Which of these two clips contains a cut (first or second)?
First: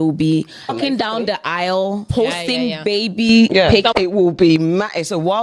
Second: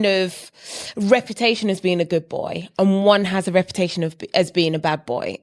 first